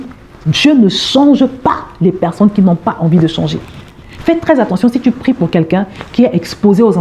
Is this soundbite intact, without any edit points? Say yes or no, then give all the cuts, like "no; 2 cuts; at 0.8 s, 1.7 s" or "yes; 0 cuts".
yes; 0 cuts